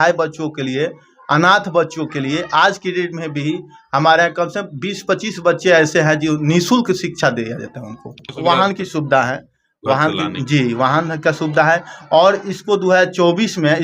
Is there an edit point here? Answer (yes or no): yes